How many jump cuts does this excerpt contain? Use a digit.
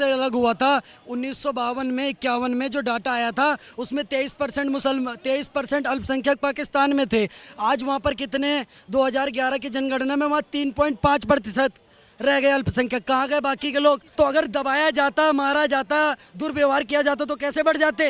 1